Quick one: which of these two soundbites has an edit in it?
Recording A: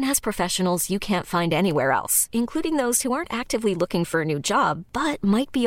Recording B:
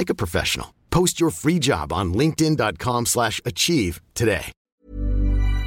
B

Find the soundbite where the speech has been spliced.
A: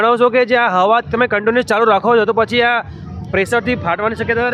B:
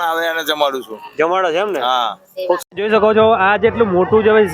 B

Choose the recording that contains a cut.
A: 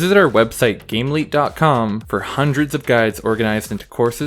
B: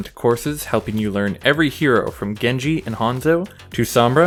A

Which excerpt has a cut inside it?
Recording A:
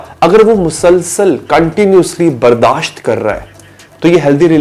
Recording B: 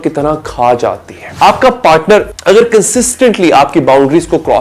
B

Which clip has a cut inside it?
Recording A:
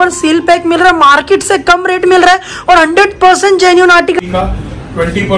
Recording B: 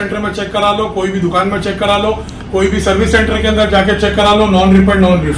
A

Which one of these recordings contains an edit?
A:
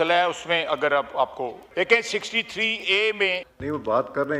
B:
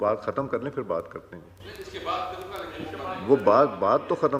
A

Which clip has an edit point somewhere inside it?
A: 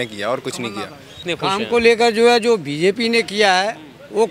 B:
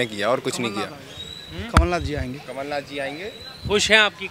A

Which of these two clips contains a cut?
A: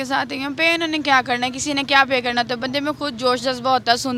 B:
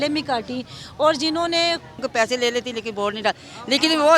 B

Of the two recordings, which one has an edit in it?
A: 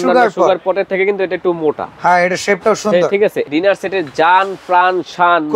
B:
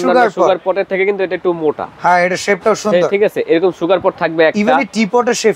A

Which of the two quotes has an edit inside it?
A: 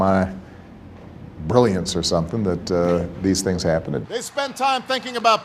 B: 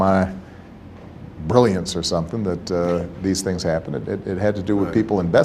A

